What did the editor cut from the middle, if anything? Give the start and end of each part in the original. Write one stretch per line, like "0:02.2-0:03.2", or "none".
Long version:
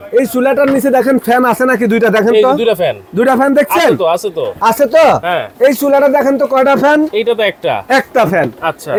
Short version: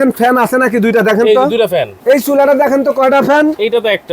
0:03.0-0:05.5